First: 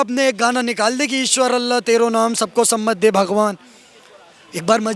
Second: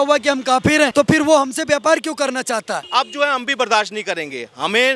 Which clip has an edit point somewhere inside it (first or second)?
second